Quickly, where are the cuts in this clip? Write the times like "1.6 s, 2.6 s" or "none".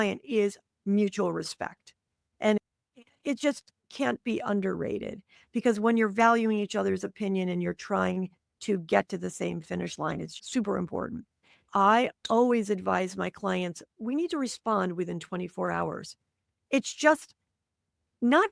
11.6 s